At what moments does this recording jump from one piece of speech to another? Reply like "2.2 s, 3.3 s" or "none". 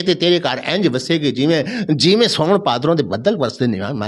none